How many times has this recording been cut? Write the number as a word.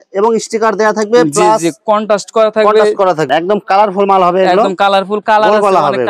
one